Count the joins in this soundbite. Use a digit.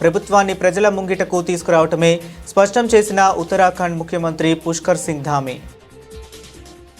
1